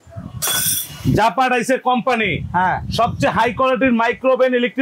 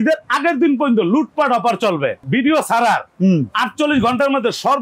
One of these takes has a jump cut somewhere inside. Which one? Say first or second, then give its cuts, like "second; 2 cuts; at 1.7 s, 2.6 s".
second; 1 cut; at 2.2 s